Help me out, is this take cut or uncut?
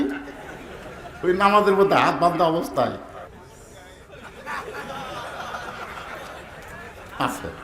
cut